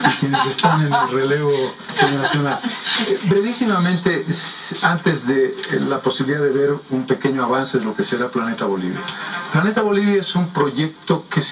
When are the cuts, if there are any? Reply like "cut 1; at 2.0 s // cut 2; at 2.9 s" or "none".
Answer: cut 1; at 8.8 s